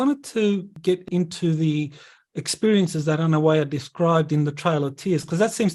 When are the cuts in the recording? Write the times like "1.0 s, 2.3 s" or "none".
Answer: 0.9 s